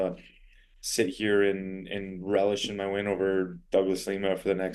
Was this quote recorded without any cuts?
yes; 0 cuts

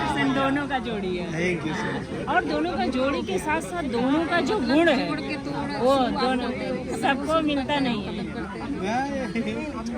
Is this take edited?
no; 0 cuts

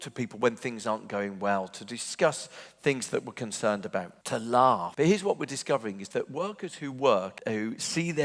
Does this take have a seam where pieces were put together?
yes; 3 cuts; at 4.2 s, 4.9 s, 7.3 s

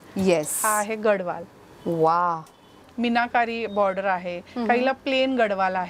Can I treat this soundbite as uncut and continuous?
no; 1 cut; at 2.8 s

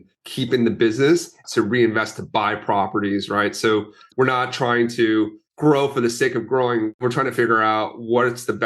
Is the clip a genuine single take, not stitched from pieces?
no; 2 cuts; at 1.3 s, 4.0 s

